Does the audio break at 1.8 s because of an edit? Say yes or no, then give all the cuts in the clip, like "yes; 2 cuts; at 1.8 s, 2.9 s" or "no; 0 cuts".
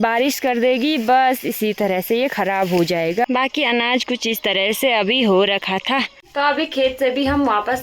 no; 2 cuts; at 3.3 s, 6.2 s